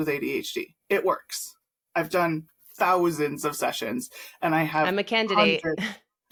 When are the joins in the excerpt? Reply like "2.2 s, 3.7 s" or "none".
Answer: none